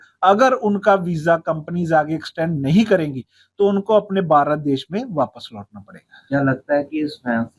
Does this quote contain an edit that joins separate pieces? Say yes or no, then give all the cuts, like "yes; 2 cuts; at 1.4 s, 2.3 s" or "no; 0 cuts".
no; 0 cuts